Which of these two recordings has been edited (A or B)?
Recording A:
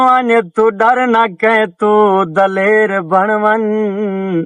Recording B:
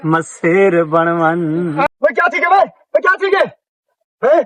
B